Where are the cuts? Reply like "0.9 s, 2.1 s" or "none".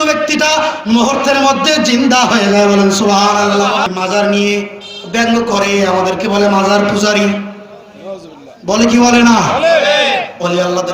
3.9 s